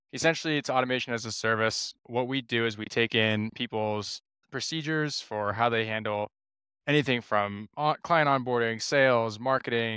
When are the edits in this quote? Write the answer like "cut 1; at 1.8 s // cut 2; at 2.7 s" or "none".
cut 1; at 1.9 s